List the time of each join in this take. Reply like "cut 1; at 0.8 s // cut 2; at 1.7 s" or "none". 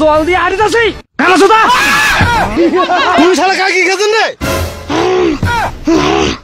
cut 1; at 2.5 s